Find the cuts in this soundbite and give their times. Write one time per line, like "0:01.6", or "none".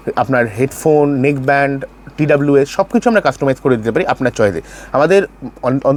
none